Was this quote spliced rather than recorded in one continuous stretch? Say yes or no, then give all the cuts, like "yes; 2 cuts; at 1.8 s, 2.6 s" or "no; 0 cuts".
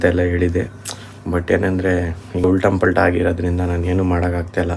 yes; 1 cut; at 2.4 s